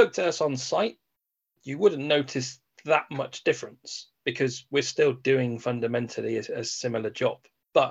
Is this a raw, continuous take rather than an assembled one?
yes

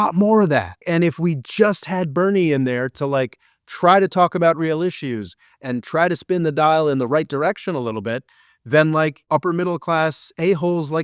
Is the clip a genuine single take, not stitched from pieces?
no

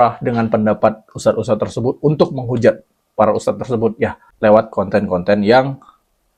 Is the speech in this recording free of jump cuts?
yes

